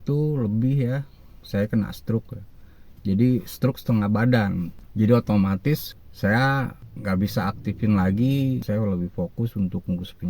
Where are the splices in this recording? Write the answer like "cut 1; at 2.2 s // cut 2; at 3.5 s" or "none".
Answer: cut 1; at 8.6 s